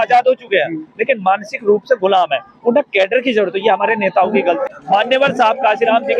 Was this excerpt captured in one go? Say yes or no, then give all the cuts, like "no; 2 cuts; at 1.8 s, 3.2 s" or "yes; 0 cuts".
no; 1 cut; at 4.6 s